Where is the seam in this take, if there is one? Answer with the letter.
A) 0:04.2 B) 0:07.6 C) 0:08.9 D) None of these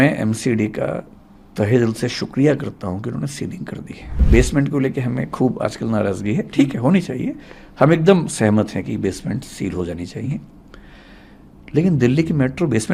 A